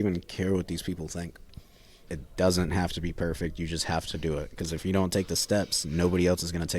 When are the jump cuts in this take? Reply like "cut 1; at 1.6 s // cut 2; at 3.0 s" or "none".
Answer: cut 1; at 1.9 s